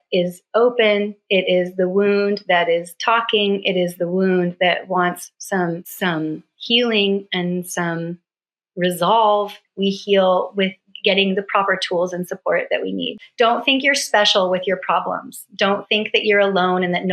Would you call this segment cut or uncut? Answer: cut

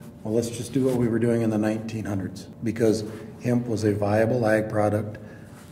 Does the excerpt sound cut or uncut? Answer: cut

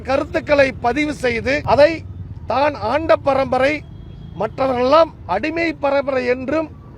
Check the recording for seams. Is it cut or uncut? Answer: cut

